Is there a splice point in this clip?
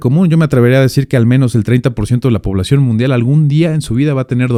no; 0 cuts

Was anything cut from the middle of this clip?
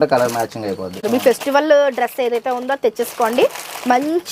yes; 1 cut; at 1.1 s

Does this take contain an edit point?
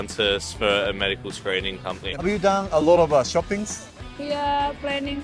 yes; 1 cut; at 2.2 s

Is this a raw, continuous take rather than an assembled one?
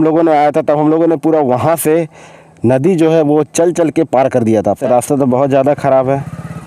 no; 1 cut; at 4.8 s

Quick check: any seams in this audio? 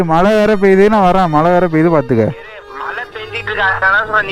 no; 0 cuts

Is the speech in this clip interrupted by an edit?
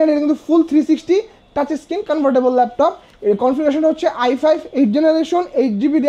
no; 0 cuts

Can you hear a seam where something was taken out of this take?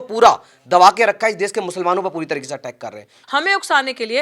yes; 1 cut; at 3.2 s

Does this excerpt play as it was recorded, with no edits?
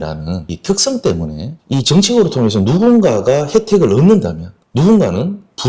no; 1 cut; at 1.6 s

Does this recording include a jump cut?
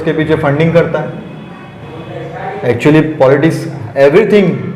no; 0 cuts

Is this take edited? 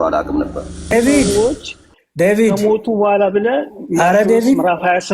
yes; 1 cut; at 0.9 s

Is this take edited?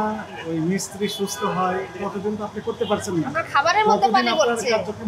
no; 0 cuts

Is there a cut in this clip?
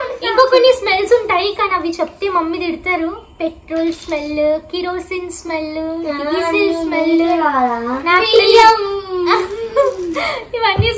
no; 0 cuts

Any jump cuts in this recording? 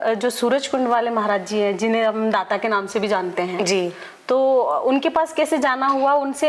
no; 0 cuts

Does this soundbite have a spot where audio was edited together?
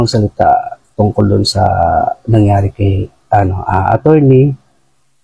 no; 0 cuts

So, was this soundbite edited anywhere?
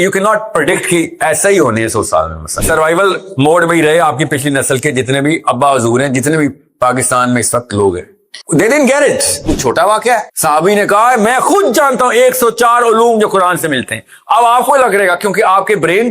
yes; 2 cuts; at 2.6 s, 9.4 s

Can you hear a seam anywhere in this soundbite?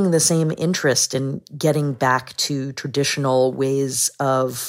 no; 0 cuts

